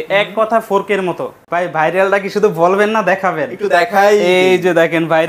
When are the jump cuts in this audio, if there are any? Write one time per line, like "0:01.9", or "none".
0:01.4